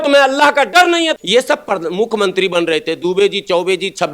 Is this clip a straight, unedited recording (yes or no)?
no